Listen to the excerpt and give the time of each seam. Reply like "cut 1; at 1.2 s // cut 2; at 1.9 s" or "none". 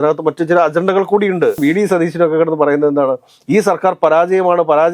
cut 1; at 1.6 s